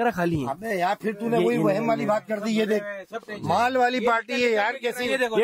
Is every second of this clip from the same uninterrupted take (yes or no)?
yes